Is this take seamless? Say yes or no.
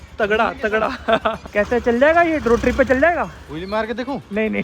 no